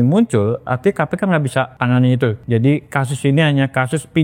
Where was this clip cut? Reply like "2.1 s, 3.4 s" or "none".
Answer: 1.7 s, 2.4 s